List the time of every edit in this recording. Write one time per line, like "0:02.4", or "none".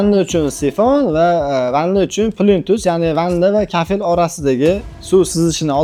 none